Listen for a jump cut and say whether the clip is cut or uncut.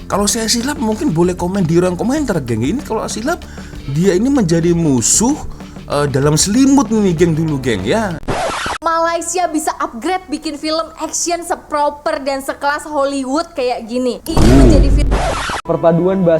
cut